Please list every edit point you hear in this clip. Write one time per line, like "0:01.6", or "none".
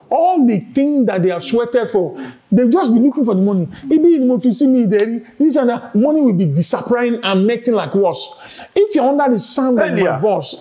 none